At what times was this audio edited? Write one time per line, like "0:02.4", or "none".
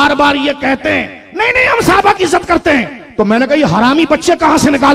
none